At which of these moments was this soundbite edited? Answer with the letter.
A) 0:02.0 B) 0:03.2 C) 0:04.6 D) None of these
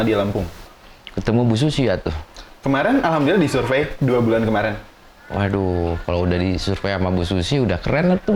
D